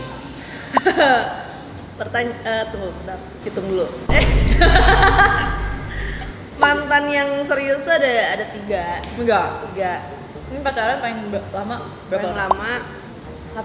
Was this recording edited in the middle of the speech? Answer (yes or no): no